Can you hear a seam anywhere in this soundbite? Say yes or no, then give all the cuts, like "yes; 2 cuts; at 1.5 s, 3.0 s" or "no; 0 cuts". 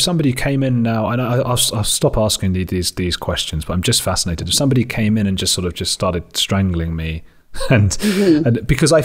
no; 0 cuts